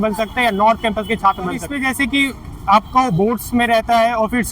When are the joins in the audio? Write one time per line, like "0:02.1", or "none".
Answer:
0:01.7